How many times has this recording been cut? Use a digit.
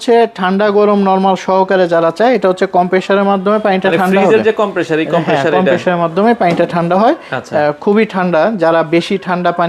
0